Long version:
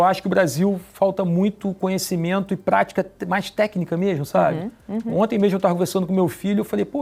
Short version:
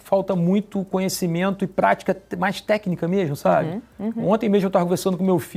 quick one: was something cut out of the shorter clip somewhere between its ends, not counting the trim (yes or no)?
no